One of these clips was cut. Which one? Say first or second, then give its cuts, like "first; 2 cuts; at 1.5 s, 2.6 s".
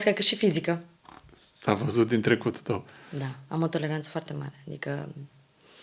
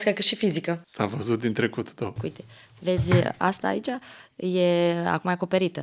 second; 2 cuts; at 0.9 s, 2.2 s